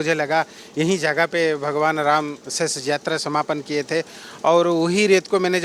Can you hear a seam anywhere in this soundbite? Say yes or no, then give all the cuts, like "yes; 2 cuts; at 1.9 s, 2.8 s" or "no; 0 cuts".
no; 0 cuts